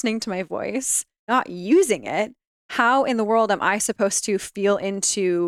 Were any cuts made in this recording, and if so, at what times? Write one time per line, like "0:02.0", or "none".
0:01.3

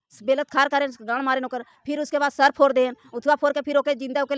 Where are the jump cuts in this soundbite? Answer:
none

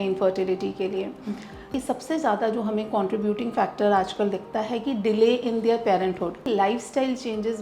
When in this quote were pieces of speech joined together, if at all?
0:01.7
0:06.5

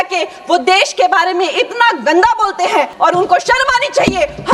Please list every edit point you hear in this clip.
0:02.9

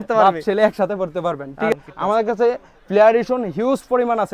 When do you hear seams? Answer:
0:01.7

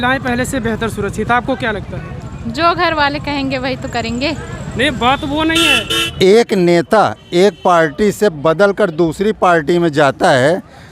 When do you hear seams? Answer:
0:05.8

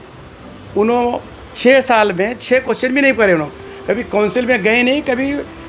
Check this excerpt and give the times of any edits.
none

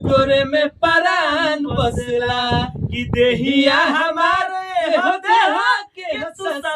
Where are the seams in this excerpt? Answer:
none

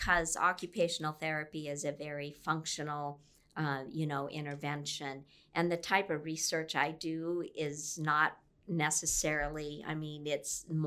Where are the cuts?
none

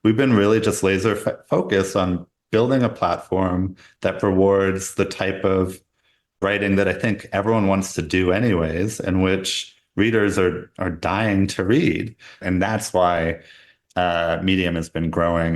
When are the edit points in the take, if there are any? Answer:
0:12.4

